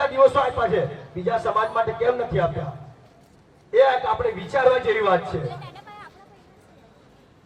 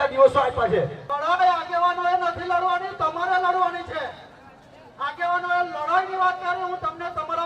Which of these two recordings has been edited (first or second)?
second